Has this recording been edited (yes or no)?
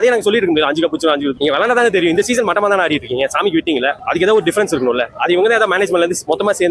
no